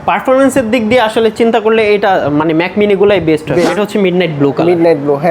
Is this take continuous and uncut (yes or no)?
no